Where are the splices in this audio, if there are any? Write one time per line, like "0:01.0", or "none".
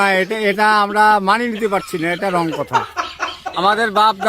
0:03.2